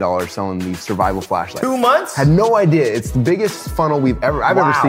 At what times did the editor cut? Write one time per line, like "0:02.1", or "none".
none